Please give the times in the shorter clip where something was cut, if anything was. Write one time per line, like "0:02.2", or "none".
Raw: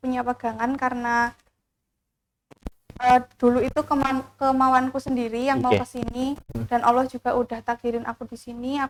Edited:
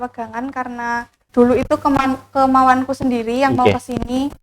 0:01.2